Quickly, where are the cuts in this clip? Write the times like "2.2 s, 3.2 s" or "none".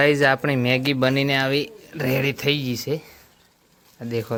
none